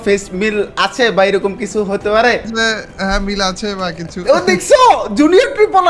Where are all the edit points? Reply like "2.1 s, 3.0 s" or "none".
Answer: 2.5 s